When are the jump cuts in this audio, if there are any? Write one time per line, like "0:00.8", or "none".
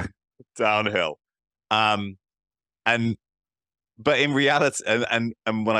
none